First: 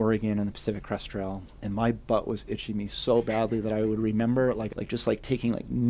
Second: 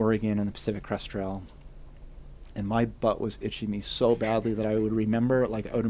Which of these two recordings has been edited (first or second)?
first